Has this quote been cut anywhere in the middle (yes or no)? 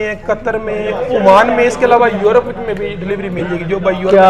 no